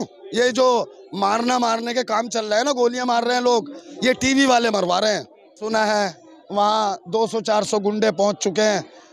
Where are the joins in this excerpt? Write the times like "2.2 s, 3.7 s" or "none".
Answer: 5.6 s